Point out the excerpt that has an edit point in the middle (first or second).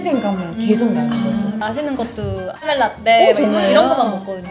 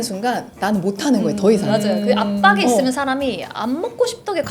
first